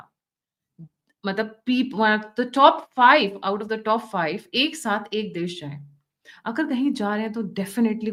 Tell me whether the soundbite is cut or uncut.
uncut